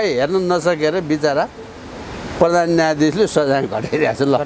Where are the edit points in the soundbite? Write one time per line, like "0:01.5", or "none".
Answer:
none